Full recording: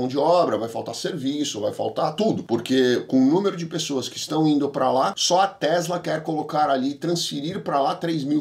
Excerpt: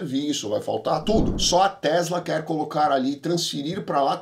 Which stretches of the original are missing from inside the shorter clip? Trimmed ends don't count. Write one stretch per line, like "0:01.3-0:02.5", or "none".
0:02.5-0:05.1